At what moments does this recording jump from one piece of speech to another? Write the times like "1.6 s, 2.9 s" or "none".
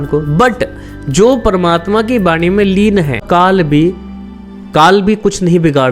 3.2 s